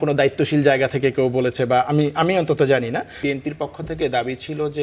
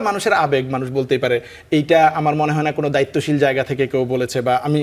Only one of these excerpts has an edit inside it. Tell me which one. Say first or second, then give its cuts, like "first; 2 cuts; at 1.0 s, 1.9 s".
first; 1 cut; at 3.1 s